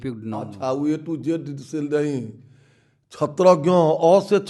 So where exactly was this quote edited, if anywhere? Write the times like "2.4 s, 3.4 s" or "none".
none